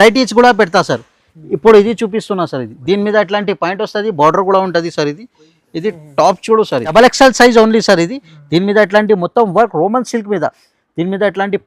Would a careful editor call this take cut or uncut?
cut